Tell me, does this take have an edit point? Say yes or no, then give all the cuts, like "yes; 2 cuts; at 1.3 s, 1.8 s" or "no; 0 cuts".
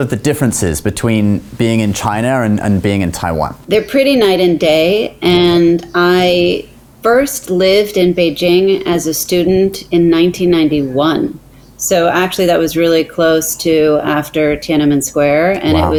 no; 0 cuts